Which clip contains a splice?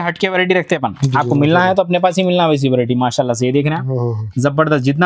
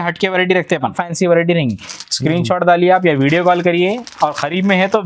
second; 1 cut; at 1.0 s

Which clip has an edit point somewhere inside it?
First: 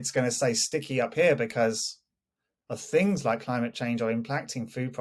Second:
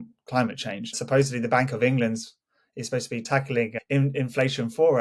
second; 2 cuts; at 1.0 s, 3.3 s

